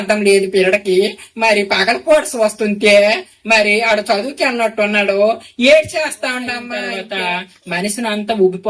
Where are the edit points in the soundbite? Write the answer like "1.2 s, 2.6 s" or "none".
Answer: 6.7 s